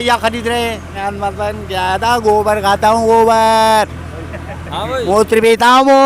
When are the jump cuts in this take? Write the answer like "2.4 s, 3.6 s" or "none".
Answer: 1.0 s